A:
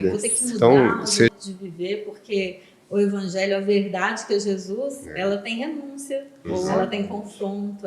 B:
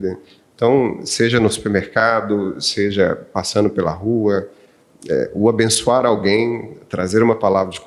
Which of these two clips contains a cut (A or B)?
A